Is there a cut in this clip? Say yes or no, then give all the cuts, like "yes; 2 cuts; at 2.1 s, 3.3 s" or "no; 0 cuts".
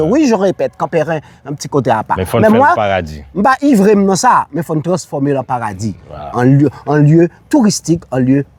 no; 0 cuts